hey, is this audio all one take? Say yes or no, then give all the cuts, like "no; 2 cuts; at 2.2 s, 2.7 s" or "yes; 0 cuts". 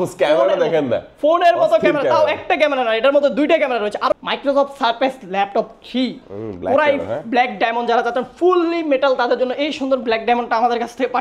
no; 1 cut; at 4.1 s